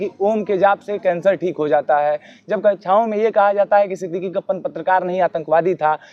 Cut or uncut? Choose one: uncut